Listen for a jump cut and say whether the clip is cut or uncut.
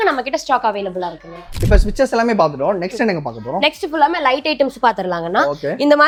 uncut